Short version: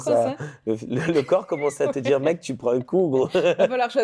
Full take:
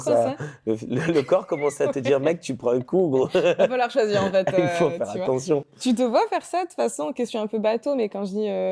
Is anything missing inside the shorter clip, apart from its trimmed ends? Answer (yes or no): no